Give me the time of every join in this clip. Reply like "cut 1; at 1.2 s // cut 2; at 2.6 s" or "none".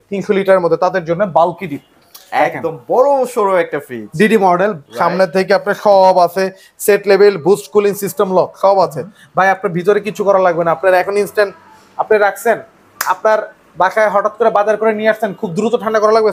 none